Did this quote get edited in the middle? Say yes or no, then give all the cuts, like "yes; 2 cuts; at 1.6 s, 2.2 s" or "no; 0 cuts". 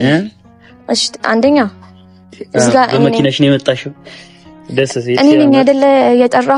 no; 0 cuts